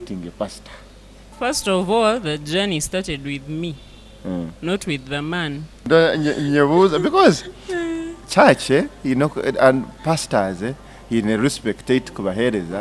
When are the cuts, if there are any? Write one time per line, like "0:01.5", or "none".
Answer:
0:01.3
0:05.9

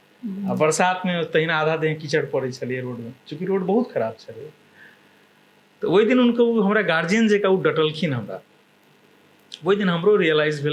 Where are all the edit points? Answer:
none

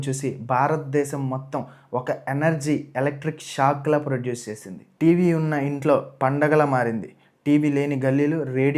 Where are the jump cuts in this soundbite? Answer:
none

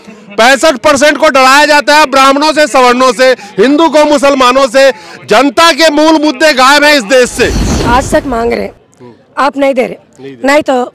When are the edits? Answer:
0:07.7

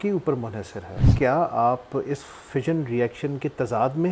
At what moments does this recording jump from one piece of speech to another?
0:01.1

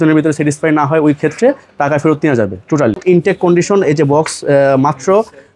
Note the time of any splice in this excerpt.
0:03.0

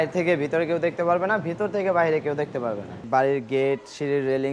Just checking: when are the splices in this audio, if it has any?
0:03.0

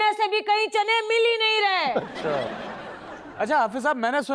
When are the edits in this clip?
0:03.0

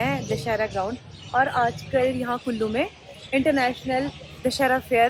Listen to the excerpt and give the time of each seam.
none

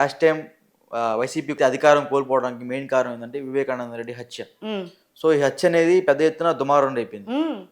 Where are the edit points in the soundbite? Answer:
0:01.5

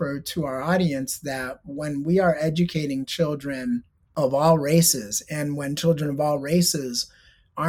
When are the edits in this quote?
0:04.0

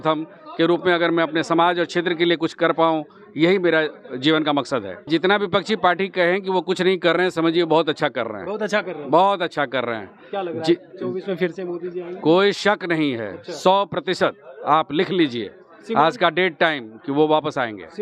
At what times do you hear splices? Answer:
0:05.1

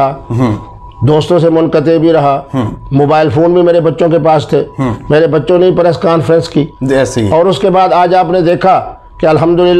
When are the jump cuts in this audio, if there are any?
none

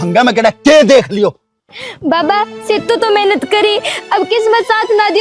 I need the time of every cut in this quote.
none

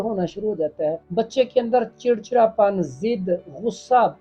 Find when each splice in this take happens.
0:01.0

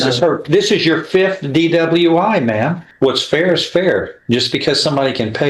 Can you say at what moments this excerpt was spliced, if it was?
0:02.8

